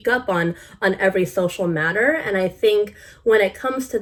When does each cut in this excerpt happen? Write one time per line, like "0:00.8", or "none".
none